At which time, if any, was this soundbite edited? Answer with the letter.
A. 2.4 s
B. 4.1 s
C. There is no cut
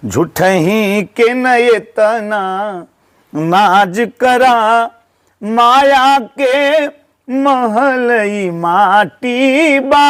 C